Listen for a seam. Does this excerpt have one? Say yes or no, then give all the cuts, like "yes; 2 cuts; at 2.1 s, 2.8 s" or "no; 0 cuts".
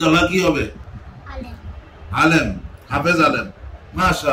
yes; 1 cut; at 0.9 s